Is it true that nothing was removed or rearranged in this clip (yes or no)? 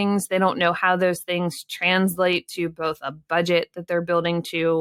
yes